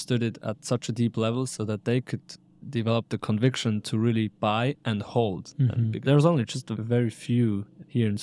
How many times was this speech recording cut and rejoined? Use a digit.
1